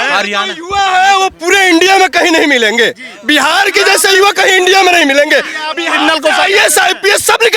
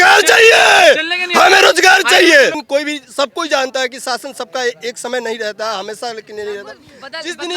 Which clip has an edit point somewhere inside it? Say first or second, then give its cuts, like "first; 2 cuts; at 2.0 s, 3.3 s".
second; 1 cut; at 2.6 s